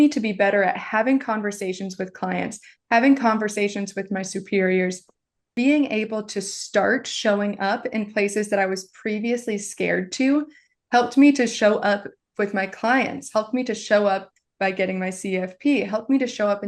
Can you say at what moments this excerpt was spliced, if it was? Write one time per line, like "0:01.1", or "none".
0:05.5